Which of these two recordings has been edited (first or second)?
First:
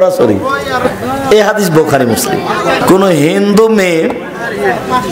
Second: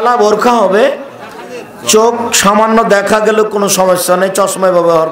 first